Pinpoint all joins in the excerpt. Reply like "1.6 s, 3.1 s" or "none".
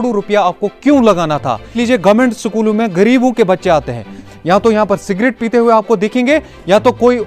1.8 s, 4.3 s